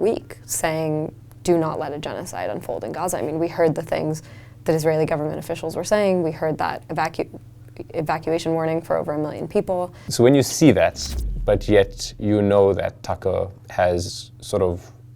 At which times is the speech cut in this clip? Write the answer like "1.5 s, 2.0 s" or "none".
10.1 s